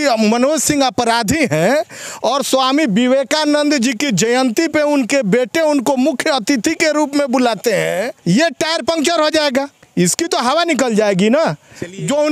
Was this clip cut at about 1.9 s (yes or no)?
no